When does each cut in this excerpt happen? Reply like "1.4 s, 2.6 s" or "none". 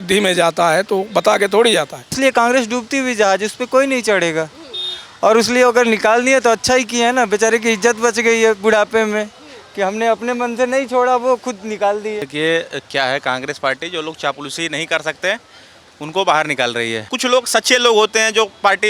2.2 s, 12.3 s, 17.1 s